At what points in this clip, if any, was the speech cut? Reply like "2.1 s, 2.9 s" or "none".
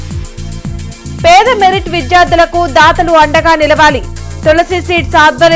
1.0 s